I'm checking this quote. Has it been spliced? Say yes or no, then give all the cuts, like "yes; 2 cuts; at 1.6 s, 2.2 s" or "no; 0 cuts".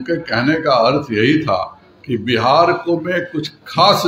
no; 0 cuts